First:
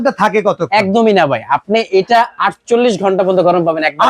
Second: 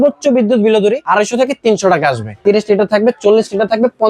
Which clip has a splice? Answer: second; 2 cuts; at 1.0 s, 2.3 s

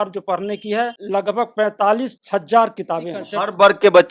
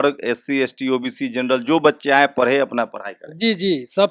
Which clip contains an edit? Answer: first; 3 cuts; at 0.9 s, 2.1 s, 3.3 s

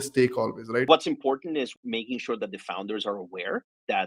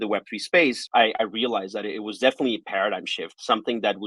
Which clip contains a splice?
first; 2 cuts; at 0.8 s, 1.7 s

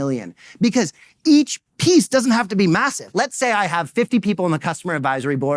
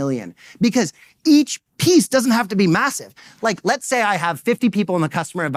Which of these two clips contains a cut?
first; 1 cut; at 3.1 s

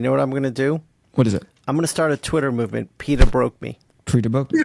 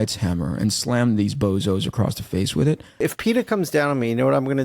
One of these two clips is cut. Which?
second; 1 cut; at 3.0 s

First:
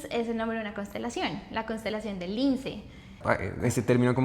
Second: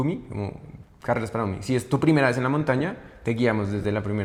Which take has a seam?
first; 1 cut; at 3.1 s

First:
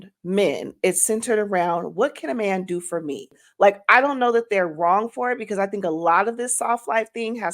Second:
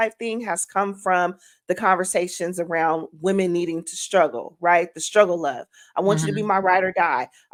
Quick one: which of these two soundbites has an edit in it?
first; 1 cut; at 3.4 s

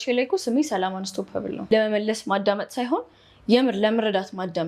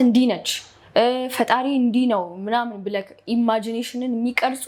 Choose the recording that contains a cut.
first; 1 cut; at 1.6 s

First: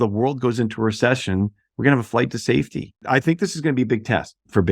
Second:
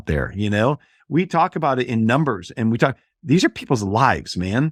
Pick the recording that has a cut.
first; 1 cut; at 2.9 s

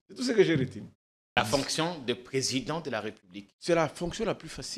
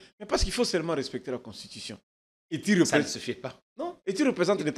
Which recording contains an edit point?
first; 1 cut; at 1.4 s

